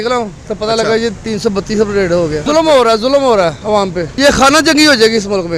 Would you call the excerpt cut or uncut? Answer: uncut